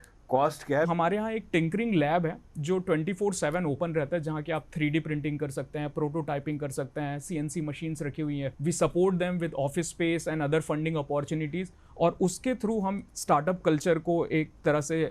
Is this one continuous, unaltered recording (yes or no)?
no